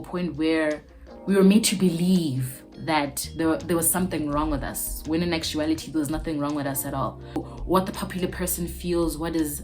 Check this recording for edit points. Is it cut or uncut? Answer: cut